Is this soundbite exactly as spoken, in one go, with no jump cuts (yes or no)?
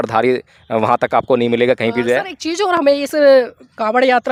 yes